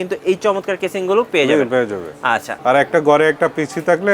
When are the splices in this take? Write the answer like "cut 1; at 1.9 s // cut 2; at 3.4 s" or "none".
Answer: cut 1; at 2.5 s